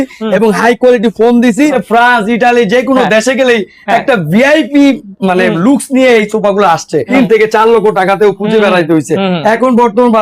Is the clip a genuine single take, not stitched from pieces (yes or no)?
no